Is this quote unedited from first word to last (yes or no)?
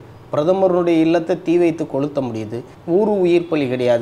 no